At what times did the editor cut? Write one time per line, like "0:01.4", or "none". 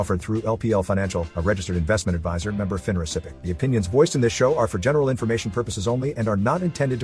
0:03.3

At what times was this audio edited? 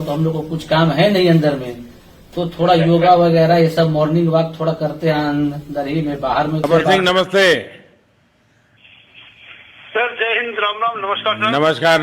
0:06.6

